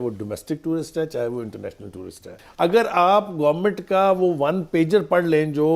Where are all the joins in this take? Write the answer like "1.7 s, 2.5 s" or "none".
2.4 s